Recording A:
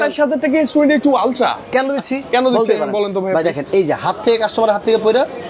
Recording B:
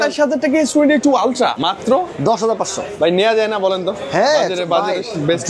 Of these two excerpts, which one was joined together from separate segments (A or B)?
B